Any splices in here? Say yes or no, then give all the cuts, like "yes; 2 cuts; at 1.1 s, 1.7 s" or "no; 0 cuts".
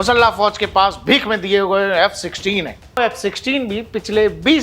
yes; 1 cut; at 3.0 s